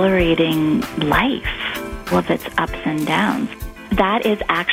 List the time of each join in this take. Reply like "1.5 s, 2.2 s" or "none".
0.9 s, 2.1 s, 3.5 s